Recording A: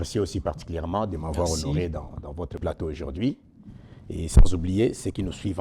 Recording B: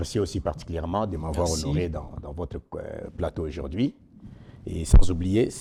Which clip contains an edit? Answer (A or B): A